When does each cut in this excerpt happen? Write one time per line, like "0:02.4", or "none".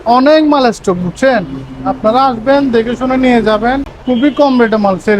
0:03.9